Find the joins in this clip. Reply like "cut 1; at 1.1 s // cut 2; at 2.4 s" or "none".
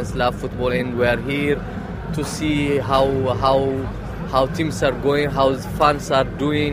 none